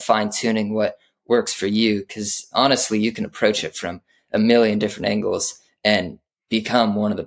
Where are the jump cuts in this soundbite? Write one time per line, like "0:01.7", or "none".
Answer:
none